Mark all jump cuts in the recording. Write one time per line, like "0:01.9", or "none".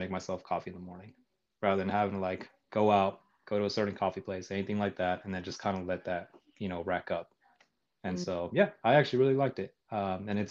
none